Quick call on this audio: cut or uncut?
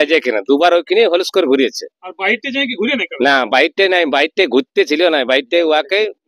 uncut